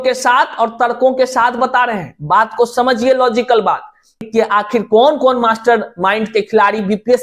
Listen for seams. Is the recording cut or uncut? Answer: cut